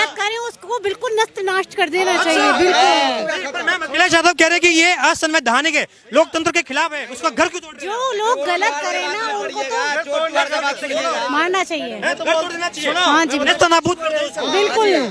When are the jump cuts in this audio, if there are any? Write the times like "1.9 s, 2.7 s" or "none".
none

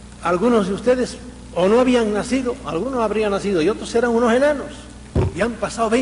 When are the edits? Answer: none

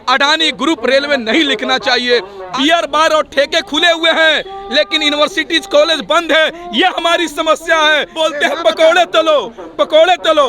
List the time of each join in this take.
2.4 s, 8.1 s

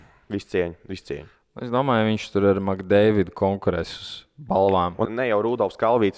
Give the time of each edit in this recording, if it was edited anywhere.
5.1 s

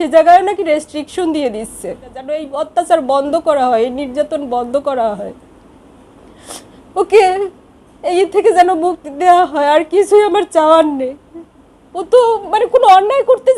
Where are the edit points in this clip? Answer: 2.4 s

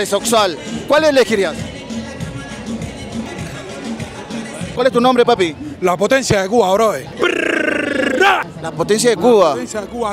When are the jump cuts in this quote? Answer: 4.7 s

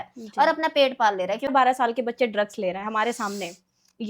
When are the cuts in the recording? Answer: 1.5 s

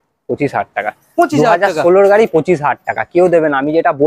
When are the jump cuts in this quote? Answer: none

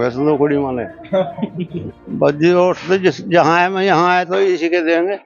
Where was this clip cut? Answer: 1.9 s

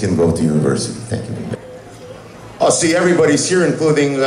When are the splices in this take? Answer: 1.5 s

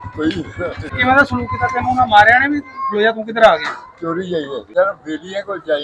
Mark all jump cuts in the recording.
1.0 s, 4.6 s

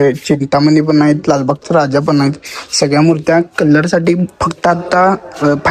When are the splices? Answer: none

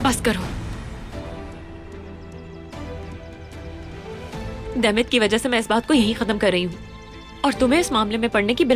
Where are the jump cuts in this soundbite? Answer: none

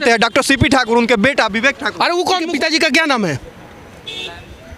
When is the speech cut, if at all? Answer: 2.5 s

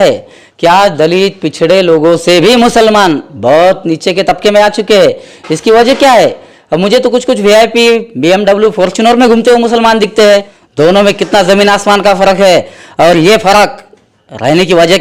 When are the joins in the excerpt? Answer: 10.6 s

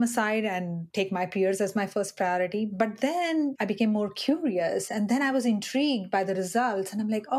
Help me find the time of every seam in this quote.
none

